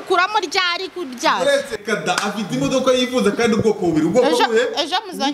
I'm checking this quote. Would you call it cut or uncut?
cut